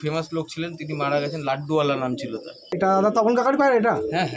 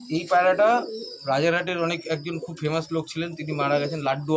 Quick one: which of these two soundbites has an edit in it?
first; 1 cut; at 2.7 s

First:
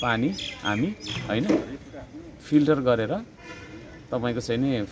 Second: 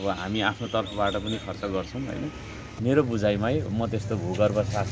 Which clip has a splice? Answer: second; 1 cut; at 2.6 s

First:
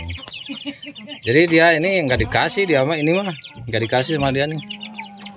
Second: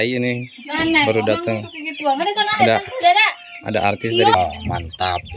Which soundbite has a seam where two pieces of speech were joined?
second; 1 cut; at 4.3 s

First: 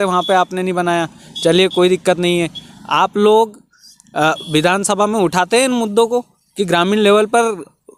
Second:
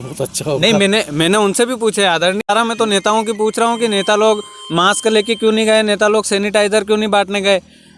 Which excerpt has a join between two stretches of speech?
second; 1 cut; at 2.4 s

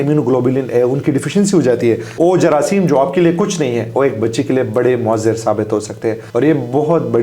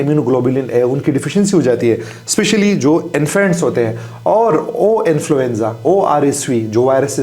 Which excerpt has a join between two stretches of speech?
first; 2 cuts; at 2.2 s, 6.2 s

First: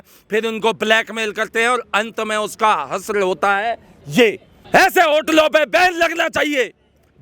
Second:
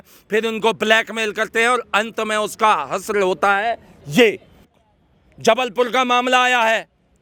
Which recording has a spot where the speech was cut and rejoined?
first; 1 cut; at 4.5 s

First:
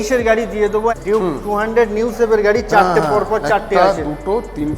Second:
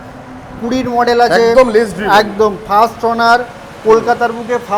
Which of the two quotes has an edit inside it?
first; 1 cut; at 0.9 s

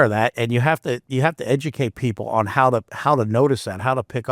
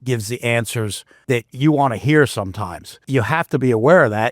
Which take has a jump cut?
second; 2 cuts; at 1.1 s, 3.0 s

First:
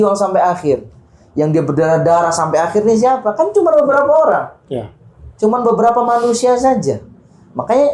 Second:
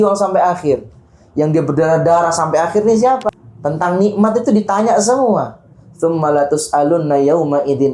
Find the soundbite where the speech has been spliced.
second; 1 cut; at 3.3 s

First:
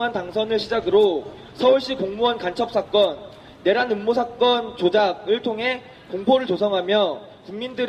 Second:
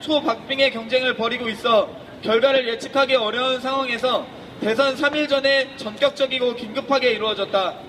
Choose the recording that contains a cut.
second; 1 cut; at 4.1 s

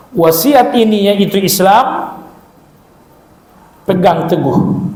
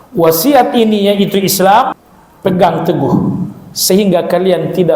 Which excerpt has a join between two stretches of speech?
second; 1 cut; at 2.1 s

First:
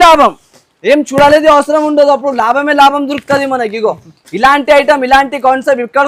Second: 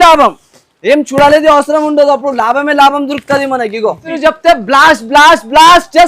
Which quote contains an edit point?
second; 1 cut; at 4.1 s

